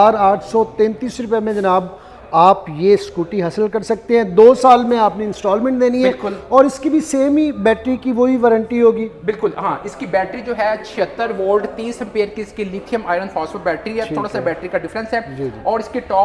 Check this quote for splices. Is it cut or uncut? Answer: uncut